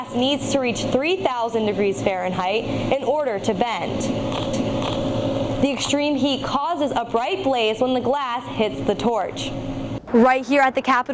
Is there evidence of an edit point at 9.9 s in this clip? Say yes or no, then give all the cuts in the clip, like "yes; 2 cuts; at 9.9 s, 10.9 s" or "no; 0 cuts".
yes; 1 cut; at 9.9 s